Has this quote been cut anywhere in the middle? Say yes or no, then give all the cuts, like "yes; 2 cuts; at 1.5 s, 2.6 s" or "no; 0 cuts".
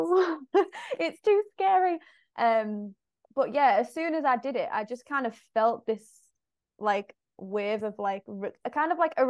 no; 0 cuts